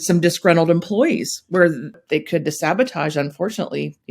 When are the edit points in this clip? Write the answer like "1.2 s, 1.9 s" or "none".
1.9 s